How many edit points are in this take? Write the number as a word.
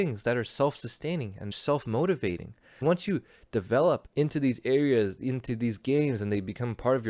two